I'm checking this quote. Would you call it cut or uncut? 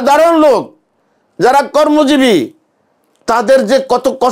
uncut